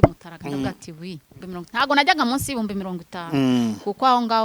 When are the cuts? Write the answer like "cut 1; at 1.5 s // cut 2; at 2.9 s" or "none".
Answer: cut 1; at 1.3 s